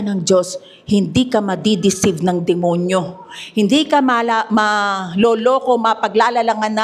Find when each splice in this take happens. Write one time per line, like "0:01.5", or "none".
none